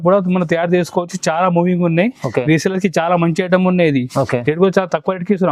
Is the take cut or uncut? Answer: uncut